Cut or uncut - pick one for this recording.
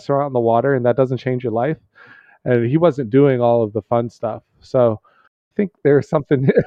cut